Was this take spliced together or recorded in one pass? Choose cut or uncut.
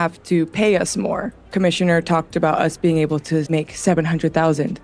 cut